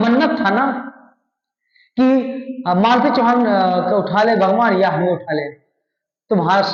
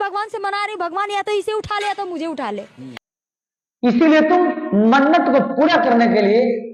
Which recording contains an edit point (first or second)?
second